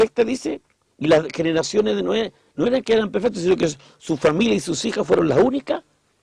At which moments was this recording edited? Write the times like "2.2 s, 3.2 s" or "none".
1.5 s